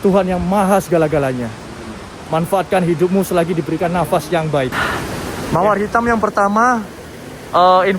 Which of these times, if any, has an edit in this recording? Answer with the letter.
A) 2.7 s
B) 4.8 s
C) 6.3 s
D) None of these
B